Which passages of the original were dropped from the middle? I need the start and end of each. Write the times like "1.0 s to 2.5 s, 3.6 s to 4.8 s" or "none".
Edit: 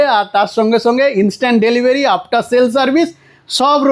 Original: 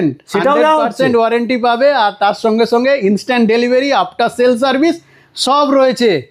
none